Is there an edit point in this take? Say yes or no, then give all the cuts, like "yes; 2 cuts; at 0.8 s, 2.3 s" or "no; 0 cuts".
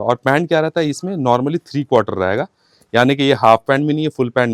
no; 0 cuts